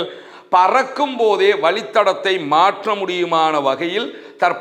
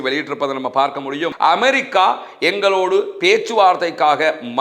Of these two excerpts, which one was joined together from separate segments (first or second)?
second